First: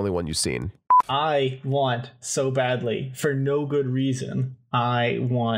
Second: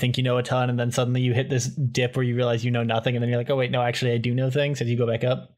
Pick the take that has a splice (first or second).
first